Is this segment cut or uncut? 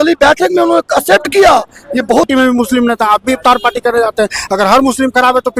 cut